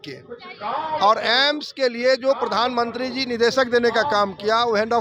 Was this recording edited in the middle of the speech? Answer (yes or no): no